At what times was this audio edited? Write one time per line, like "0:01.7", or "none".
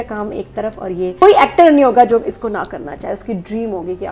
0:01.2